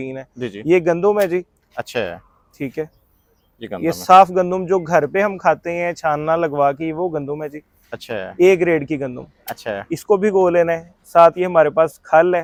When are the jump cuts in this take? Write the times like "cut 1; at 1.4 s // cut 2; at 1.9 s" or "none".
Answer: none